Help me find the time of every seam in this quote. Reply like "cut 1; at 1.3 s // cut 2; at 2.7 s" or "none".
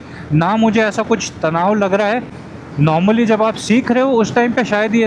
cut 1; at 2.4 s